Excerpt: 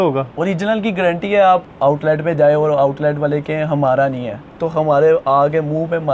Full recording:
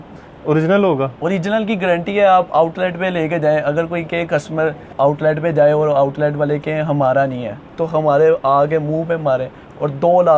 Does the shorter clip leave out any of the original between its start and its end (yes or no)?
yes